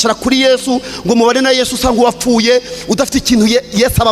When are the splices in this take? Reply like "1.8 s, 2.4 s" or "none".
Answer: none

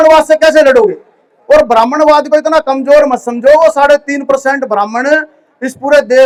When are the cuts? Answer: none

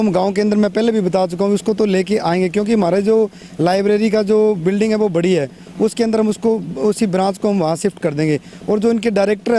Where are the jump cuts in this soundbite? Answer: none

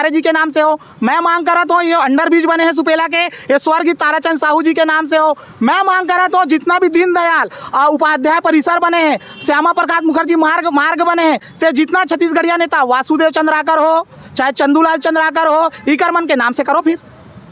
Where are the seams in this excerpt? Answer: none

